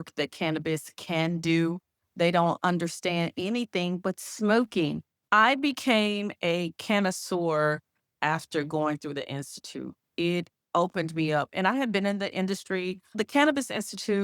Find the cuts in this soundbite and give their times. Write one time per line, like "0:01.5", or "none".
0:05.1
0:13.2